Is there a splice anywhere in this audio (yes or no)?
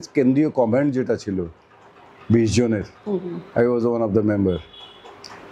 no